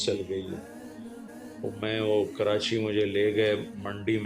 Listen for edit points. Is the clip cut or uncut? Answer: cut